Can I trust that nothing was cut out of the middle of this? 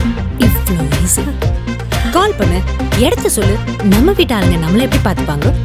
yes; 0 cuts

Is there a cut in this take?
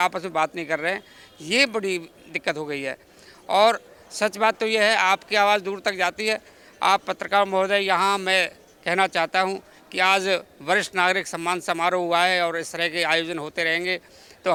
no; 0 cuts

